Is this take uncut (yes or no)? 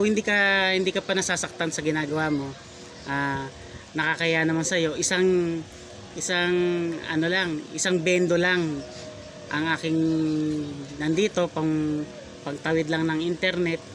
yes